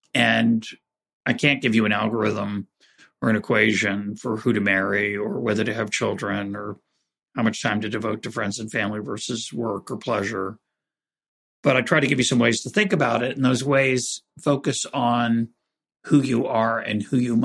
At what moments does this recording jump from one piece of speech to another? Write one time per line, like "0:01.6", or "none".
0:01.2